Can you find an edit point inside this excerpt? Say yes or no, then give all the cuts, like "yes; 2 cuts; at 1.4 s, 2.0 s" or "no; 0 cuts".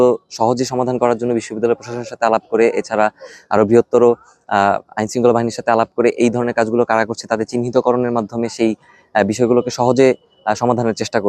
no; 0 cuts